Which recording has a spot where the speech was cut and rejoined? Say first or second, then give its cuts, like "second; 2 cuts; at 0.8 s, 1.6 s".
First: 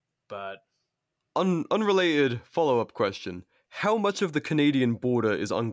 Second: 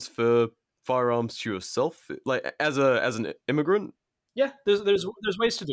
second; 1 cut; at 3.4 s